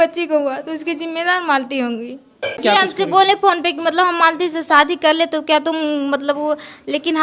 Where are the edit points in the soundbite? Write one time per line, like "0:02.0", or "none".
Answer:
0:02.6